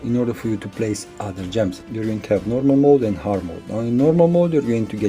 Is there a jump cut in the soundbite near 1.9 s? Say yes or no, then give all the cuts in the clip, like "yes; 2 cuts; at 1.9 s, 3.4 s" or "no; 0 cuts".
yes; 1 cut; at 1.9 s